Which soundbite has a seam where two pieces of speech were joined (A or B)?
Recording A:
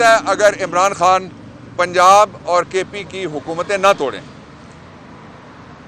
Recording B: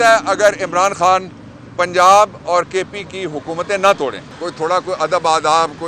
B